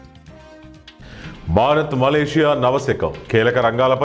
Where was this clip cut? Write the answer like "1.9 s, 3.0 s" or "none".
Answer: 1.0 s